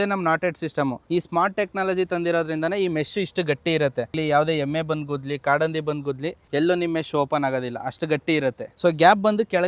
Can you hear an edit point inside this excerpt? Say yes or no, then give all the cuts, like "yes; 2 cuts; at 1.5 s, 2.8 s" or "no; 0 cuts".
yes; 4 cuts; at 1.0 s, 4.1 s, 6.3 s, 8.7 s